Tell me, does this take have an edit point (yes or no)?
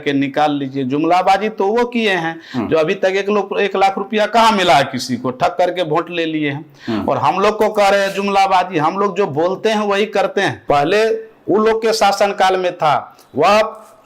yes